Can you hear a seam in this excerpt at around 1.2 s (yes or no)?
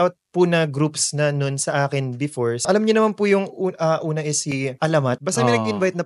no